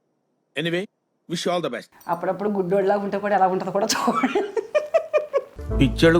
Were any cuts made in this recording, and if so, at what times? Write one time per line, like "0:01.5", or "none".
0:01.9